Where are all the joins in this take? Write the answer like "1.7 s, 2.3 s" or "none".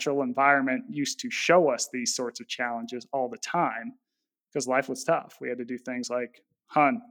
none